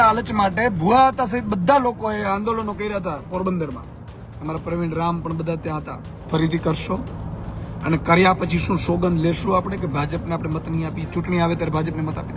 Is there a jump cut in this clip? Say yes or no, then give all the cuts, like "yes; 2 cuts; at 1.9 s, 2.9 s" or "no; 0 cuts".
yes; 1 cut; at 6.2 s